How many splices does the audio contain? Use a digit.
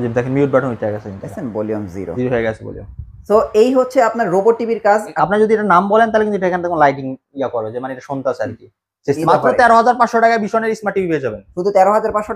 2